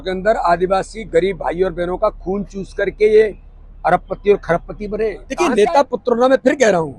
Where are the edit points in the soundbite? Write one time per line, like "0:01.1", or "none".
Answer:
0:05.2